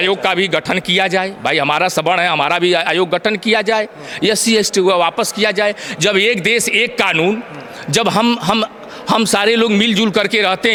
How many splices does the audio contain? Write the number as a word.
zero